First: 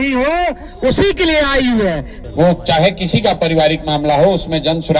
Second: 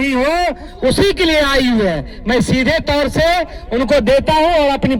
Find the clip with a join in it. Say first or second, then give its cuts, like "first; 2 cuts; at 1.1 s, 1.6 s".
first; 1 cut; at 2.1 s